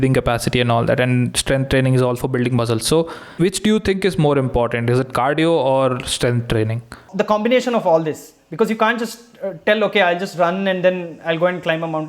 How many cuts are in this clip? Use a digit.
2